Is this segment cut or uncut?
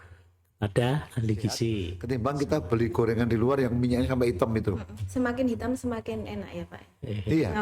cut